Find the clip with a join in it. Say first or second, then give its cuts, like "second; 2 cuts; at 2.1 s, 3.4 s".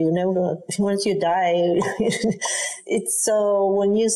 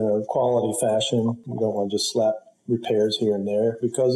first; 1 cut; at 2.7 s